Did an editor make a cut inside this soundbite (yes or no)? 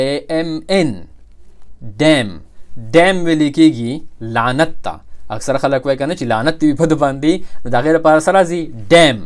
no